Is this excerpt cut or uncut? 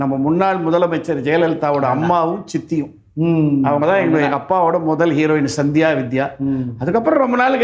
uncut